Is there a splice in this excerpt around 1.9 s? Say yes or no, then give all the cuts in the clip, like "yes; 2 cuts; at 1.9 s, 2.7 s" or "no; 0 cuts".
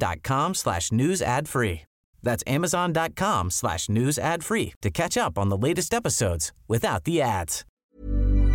no; 1 cut; at 7.6 s